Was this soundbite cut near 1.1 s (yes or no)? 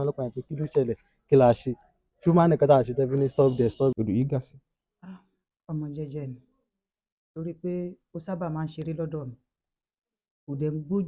no